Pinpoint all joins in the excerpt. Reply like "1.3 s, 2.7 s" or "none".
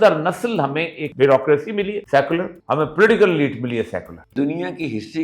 1.0 s, 2.0 s, 2.6 s, 4.3 s